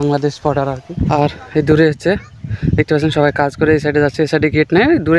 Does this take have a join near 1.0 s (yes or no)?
yes